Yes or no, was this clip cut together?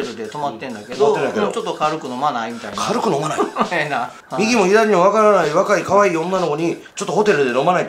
no